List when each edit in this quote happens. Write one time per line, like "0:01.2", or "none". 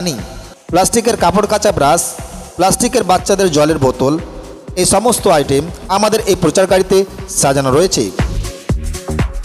0:08.1